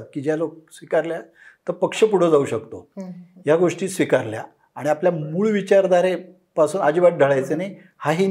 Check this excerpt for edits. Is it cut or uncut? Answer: uncut